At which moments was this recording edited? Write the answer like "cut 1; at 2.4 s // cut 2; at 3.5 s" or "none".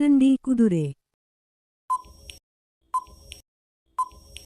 cut 1; at 1.4 s